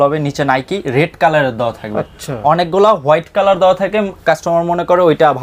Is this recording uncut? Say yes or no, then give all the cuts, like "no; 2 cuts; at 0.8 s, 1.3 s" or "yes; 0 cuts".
yes; 0 cuts